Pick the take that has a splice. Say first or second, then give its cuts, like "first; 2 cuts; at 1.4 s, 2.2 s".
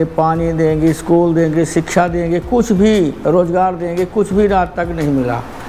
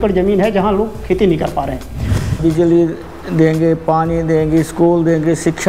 second; 1 cut; at 2.4 s